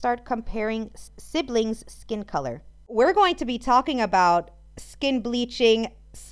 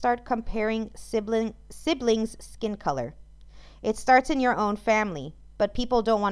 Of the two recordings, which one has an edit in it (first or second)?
first